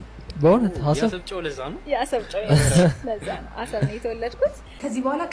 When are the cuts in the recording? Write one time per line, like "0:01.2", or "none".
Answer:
none